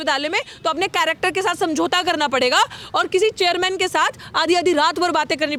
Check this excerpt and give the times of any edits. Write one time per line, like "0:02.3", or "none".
none